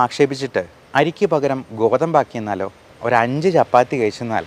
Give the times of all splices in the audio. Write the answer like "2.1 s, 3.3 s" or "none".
2.9 s